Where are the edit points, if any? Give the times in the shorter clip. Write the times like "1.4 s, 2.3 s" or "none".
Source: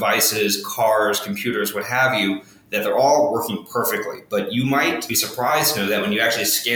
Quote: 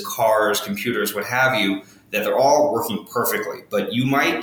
none